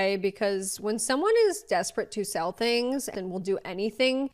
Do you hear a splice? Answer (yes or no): yes